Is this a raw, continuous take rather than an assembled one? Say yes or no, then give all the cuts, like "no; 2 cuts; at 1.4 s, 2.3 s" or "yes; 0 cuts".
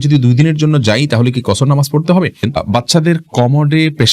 no; 1 cut; at 2.4 s